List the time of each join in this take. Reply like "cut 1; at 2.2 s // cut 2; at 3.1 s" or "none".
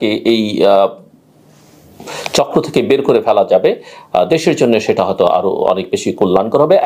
none